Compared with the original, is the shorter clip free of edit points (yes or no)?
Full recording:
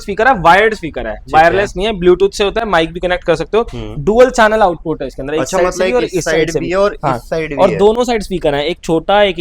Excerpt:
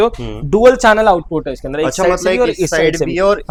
yes